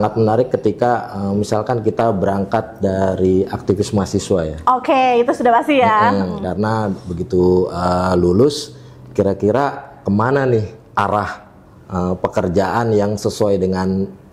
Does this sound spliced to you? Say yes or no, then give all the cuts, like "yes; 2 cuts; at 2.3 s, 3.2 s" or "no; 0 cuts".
no; 0 cuts